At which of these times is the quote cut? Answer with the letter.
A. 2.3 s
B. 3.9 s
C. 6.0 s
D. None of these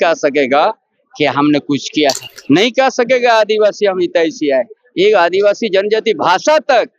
A